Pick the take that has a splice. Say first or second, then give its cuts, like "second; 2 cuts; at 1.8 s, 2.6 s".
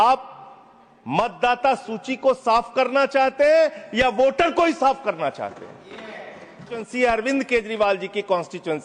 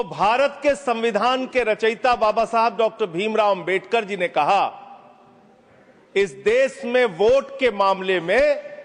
first; 1 cut; at 6.9 s